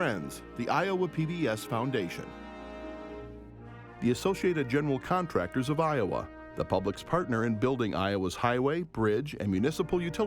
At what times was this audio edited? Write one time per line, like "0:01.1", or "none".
0:02.2
0:04.0

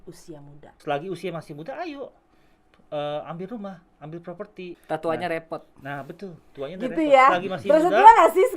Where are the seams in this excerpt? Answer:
0:00.8
0:04.8

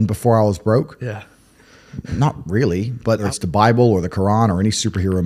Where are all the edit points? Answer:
0:03.2

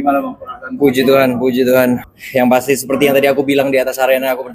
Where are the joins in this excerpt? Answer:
0:02.1

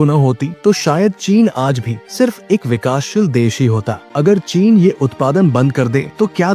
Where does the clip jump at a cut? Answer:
0:04.0

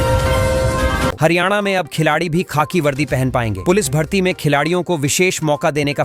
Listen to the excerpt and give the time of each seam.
0:01.2

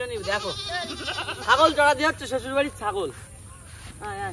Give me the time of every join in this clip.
none

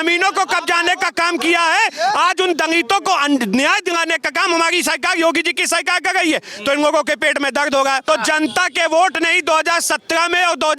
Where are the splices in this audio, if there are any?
0:08.0

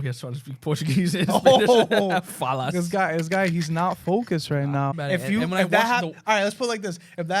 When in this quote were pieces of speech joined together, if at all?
0:04.9

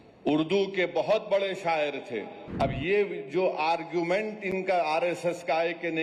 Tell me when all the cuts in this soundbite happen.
0:02.4

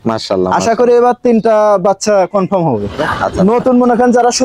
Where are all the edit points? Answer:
0:03.0

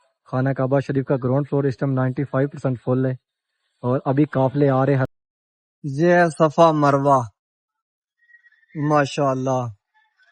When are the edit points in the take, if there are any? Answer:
0:05.1

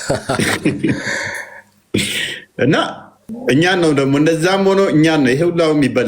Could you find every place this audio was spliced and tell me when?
0:03.2

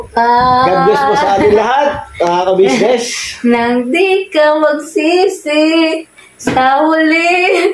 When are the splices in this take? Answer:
none

